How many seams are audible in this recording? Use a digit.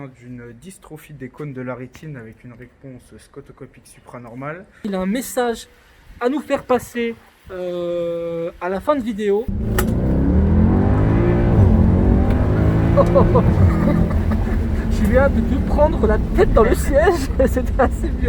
2